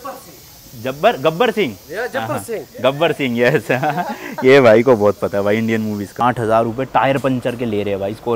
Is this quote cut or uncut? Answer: cut